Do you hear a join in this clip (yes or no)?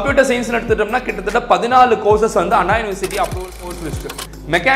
yes